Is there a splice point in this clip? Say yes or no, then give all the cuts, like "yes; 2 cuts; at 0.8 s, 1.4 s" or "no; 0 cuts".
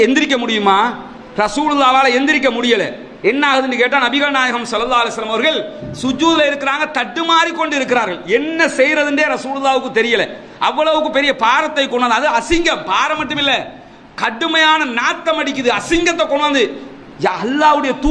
no; 0 cuts